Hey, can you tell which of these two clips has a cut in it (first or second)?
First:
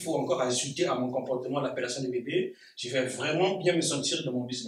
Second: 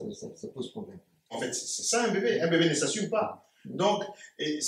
second